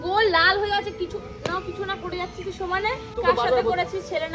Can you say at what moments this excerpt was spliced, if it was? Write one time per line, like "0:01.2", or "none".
0:03.1